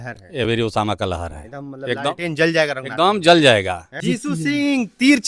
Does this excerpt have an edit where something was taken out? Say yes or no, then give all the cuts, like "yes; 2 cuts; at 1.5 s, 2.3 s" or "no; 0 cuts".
yes; 1 cut; at 4.0 s